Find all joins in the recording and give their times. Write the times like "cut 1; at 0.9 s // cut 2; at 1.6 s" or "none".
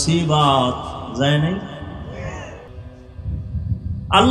cut 1; at 2.7 s